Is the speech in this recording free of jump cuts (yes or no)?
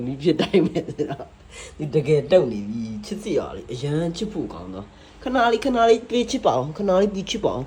yes